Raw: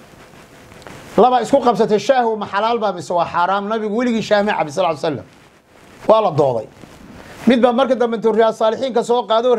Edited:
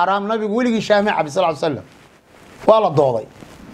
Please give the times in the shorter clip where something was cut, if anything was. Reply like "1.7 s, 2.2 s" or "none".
none